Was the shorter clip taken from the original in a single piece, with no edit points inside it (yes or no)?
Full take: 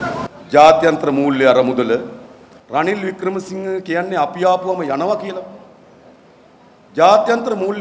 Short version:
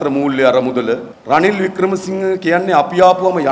no